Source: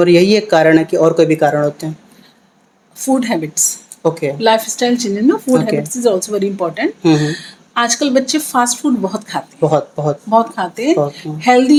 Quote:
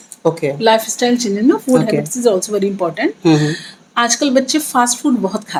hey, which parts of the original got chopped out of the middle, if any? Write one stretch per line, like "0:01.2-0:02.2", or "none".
none